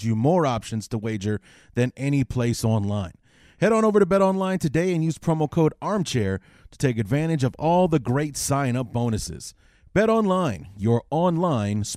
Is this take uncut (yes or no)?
yes